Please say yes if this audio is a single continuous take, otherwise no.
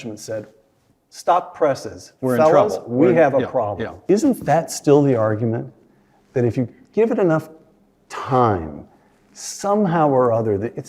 no